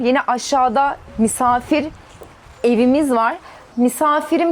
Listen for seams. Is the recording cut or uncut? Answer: cut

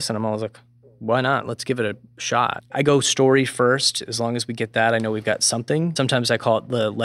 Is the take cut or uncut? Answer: cut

